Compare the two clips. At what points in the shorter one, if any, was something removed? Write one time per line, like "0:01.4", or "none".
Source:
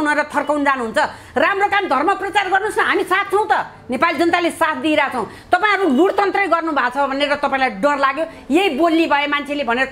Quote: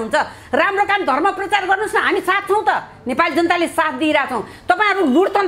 none